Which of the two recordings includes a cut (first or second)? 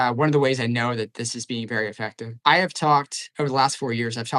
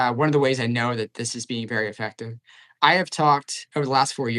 first